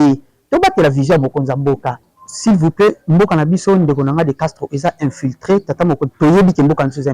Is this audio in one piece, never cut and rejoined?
no; 1 cut; at 2.1 s

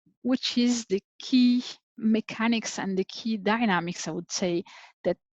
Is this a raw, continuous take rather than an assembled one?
no; 1 cut; at 1.9 s

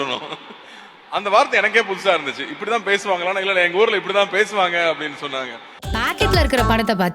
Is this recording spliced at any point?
yes; 1 cut; at 5.9 s

